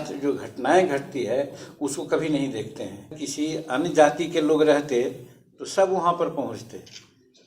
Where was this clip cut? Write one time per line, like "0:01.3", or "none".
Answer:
0:03.2